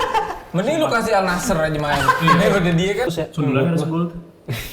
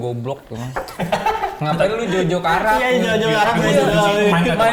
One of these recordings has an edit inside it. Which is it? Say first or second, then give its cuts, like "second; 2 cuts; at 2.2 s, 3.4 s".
first; 1 cut; at 3.1 s